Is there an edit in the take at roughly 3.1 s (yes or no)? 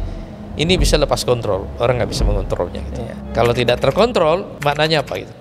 yes